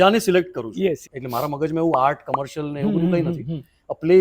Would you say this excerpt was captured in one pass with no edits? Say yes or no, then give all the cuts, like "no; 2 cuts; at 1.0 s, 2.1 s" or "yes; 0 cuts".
no; 1 cut; at 1.1 s